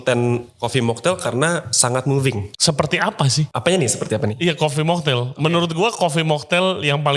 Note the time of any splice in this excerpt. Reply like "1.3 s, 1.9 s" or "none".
2.5 s, 3.5 s